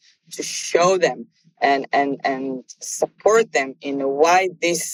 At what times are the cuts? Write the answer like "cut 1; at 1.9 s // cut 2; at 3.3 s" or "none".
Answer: none

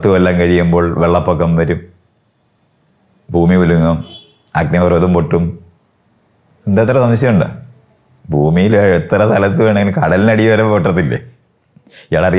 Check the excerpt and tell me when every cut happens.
none

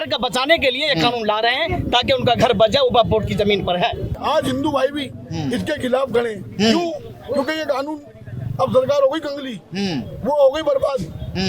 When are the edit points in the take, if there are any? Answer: cut 1; at 4.1 s

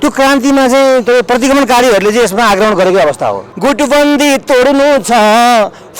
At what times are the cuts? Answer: cut 1; at 3.5 s

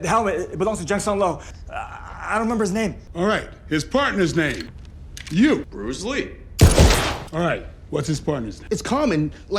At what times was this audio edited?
cut 1; at 1.4 s // cut 2; at 8.6 s

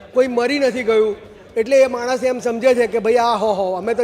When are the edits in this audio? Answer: none

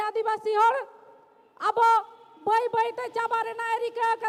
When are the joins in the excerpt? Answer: none

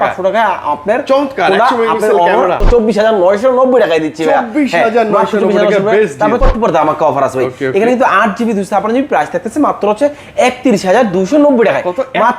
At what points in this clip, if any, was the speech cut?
cut 1; at 2.6 s // cut 2; at 6.4 s

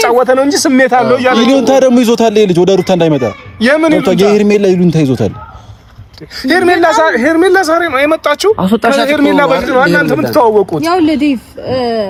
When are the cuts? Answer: none

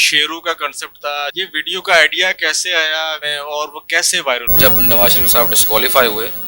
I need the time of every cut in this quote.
cut 1; at 1.3 s // cut 2; at 3.3 s // cut 3; at 4.5 s

